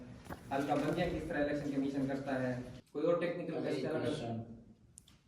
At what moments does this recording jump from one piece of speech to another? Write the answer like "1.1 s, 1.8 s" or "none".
2.8 s